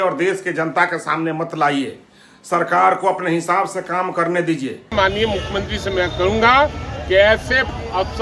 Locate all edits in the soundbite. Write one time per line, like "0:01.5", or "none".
0:04.9